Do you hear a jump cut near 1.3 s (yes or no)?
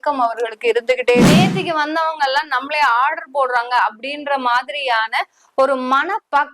yes